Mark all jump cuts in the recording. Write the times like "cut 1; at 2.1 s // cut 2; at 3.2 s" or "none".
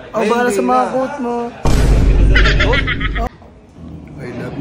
cut 1; at 3.3 s